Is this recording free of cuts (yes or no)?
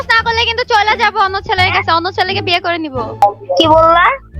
no